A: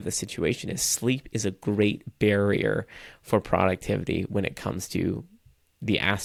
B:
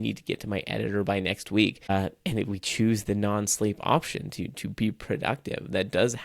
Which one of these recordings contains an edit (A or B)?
B